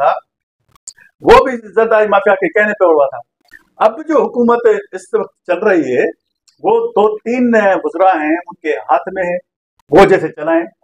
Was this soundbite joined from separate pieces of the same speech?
no; 0 cuts

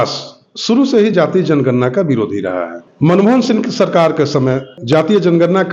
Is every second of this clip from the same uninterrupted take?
no; 2 cuts; at 2.8 s, 4.7 s

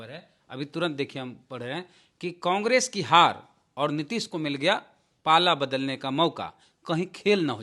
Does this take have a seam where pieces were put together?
no; 0 cuts

